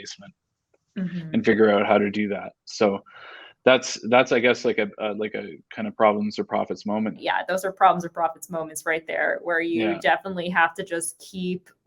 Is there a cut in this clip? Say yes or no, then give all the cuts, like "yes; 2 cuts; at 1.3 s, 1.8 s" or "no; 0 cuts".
yes; 1 cut; at 7.2 s